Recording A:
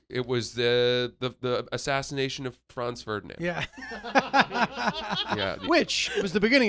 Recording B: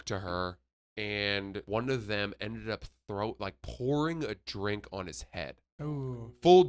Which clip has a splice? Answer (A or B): B